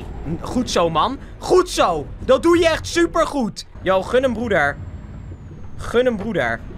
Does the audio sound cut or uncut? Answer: uncut